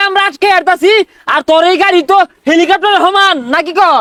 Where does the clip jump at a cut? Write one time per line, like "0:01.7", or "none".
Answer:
none